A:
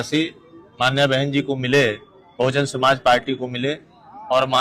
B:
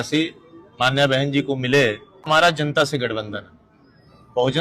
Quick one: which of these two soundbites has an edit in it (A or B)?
B